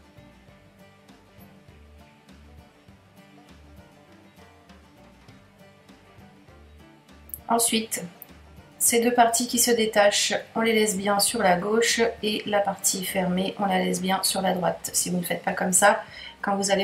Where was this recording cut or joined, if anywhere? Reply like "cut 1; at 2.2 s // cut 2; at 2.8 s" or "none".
cut 1; at 10.4 s